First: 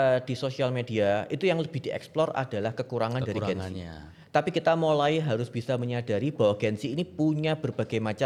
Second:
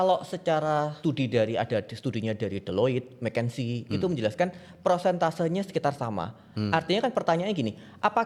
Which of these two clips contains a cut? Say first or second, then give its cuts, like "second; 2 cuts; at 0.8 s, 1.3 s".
second; 1 cut; at 0.9 s